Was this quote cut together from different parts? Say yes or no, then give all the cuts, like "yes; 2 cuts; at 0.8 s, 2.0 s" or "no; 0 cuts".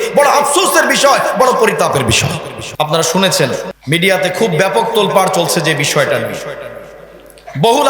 yes; 2 cuts; at 2.6 s, 3.7 s